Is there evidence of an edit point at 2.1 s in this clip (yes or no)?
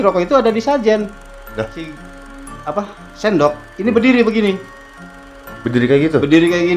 yes